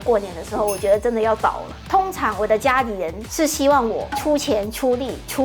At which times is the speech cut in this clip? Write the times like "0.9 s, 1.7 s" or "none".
1.8 s